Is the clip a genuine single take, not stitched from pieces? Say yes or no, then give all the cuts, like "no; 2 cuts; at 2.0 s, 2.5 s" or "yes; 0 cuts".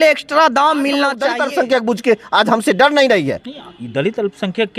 no; 1 cut; at 1.2 s